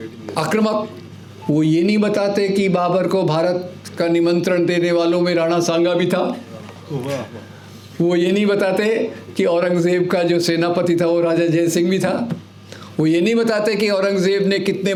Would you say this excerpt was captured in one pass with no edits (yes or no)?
yes